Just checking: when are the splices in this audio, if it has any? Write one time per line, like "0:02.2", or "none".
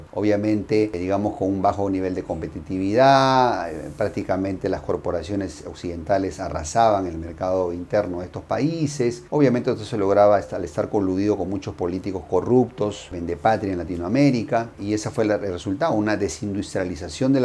none